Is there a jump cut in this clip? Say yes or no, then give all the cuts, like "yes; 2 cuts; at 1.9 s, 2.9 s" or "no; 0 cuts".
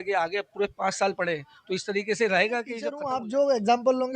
yes; 1 cut; at 2.9 s